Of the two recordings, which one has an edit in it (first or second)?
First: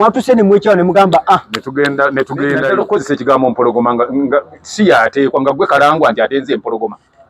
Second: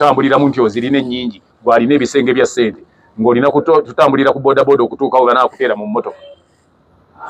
first